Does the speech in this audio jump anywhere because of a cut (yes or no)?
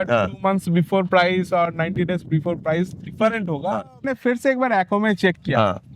yes